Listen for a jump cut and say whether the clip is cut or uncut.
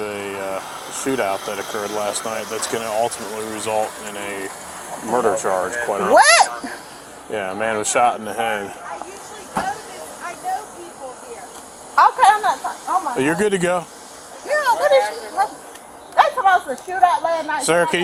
uncut